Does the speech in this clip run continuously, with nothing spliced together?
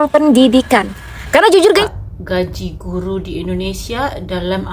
no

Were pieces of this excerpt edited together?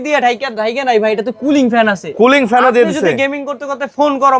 no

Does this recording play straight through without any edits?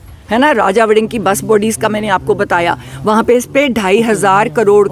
yes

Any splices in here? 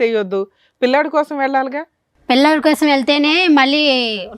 no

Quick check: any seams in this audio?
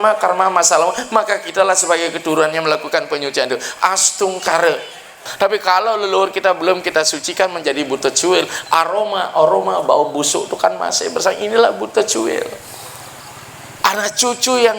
yes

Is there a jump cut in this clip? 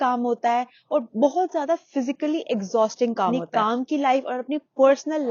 yes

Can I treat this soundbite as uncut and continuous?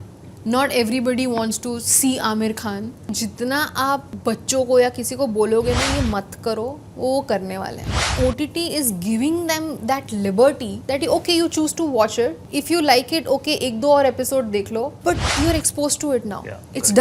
no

